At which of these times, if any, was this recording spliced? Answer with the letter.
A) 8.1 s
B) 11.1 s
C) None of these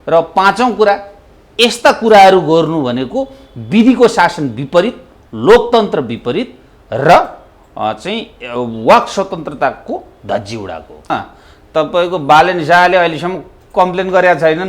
B